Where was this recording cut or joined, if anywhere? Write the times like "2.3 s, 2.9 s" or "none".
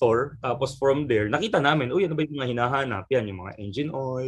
none